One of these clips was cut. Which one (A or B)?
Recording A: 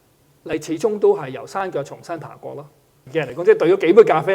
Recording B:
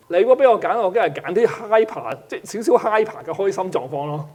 A